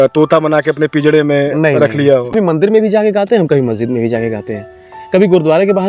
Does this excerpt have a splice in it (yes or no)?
yes